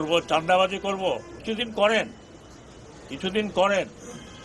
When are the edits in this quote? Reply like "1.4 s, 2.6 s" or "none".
1.3 s